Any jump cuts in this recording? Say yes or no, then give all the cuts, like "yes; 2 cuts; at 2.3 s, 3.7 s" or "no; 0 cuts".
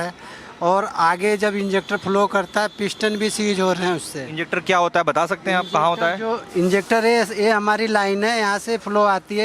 no; 0 cuts